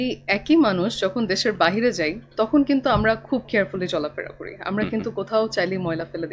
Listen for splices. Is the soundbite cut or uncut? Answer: uncut